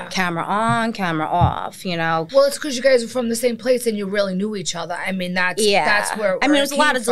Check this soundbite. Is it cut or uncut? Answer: cut